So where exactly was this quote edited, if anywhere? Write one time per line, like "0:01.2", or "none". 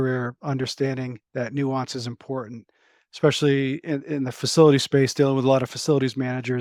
none